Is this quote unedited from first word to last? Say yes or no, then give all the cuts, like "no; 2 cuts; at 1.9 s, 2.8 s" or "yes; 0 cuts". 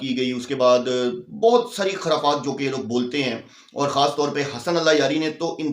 yes; 0 cuts